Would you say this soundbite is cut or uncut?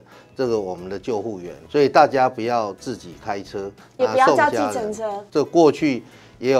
cut